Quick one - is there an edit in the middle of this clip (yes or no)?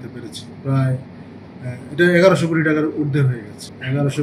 no